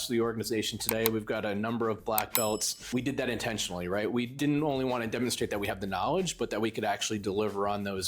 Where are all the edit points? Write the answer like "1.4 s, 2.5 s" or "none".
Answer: 2.9 s, 4.3 s